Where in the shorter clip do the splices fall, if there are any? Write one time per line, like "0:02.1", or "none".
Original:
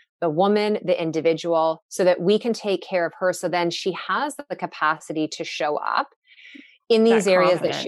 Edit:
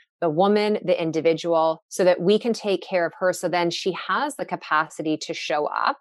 0:04.4